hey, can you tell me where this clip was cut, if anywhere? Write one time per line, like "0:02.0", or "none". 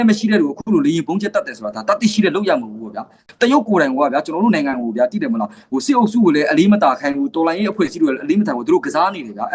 0:03.2